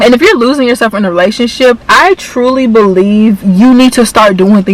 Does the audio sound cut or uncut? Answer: uncut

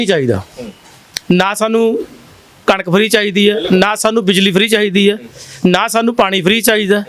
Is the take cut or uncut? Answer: uncut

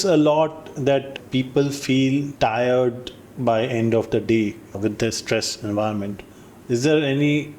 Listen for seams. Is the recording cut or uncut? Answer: cut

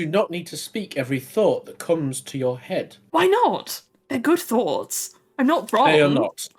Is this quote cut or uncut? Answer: uncut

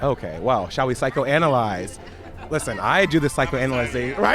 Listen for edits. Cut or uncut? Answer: uncut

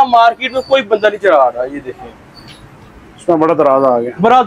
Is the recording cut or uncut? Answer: uncut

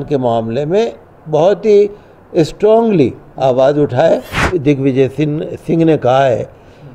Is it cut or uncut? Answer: cut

